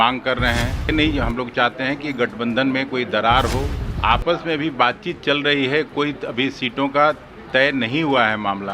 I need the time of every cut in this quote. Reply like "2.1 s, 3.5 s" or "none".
0.9 s, 3.8 s